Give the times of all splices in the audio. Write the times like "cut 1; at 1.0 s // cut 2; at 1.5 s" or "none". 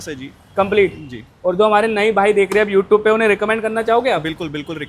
none